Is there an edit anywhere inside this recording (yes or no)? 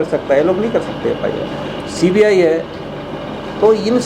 no